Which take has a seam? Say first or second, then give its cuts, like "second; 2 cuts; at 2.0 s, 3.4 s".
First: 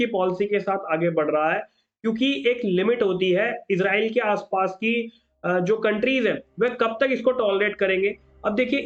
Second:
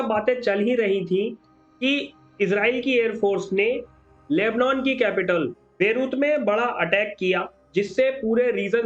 second; 1 cut; at 5.6 s